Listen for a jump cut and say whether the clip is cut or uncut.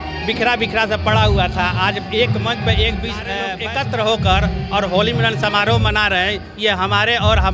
cut